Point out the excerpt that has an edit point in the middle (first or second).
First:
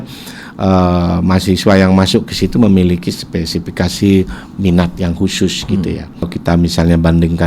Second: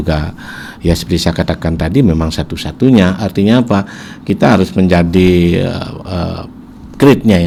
first